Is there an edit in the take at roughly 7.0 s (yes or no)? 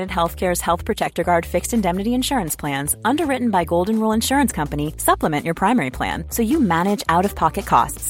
no